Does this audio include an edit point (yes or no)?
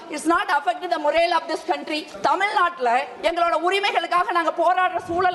yes